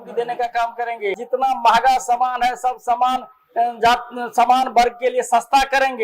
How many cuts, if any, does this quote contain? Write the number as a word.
one